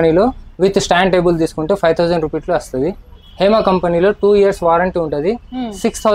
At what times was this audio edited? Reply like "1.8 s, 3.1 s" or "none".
none